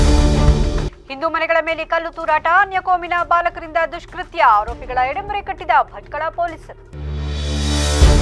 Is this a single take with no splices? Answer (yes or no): yes